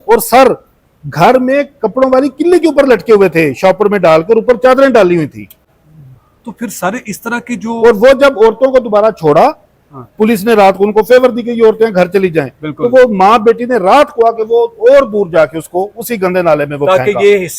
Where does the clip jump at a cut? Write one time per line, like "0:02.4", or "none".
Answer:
none